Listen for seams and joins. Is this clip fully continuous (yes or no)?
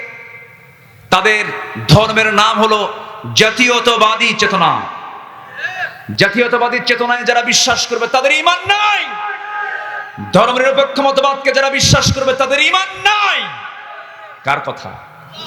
yes